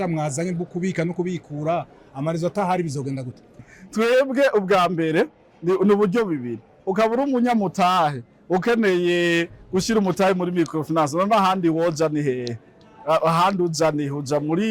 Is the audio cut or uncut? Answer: cut